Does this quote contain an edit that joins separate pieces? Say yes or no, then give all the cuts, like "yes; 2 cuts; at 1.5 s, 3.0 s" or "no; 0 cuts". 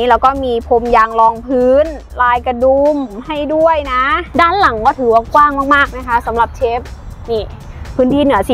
yes; 1 cut; at 4.2 s